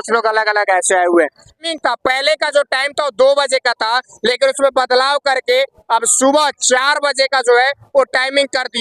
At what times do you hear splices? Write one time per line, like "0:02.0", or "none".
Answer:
0:01.6